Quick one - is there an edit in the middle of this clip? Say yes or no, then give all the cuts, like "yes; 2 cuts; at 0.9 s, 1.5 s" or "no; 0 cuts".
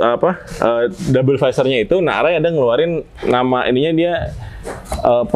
no; 0 cuts